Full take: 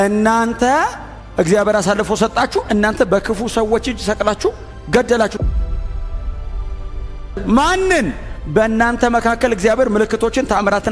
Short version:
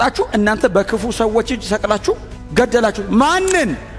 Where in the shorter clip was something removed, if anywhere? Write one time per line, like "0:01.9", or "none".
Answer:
0:03.0